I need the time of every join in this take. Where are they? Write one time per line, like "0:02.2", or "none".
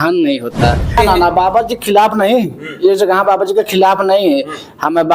0:01.0